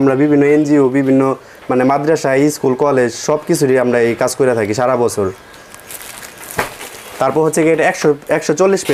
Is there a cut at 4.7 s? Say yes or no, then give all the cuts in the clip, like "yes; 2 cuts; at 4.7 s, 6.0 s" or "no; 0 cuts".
no; 0 cuts